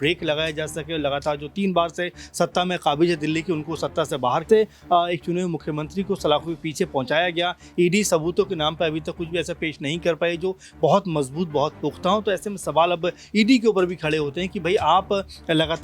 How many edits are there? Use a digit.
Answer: 1